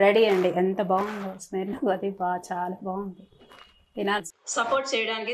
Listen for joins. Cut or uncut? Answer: uncut